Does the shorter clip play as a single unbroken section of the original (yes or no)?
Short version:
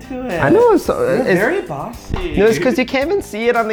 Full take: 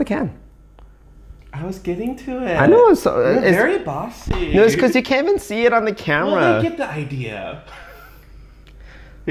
yes